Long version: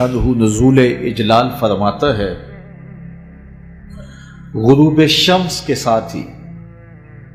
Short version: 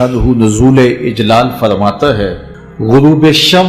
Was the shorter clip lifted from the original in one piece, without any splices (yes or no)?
no